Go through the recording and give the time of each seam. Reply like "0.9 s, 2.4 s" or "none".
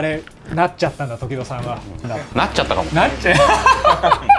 1.9 s